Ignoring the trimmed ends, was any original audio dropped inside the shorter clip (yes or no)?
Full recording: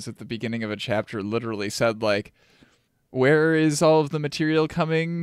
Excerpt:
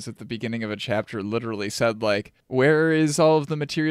yes